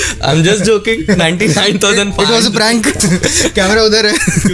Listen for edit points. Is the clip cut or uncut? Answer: uncut